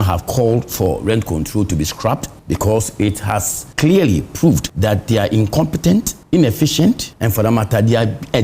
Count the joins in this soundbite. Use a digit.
5